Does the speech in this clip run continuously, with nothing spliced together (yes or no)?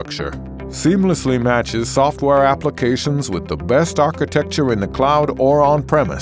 yes